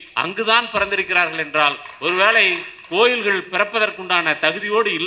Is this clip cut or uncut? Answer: uncut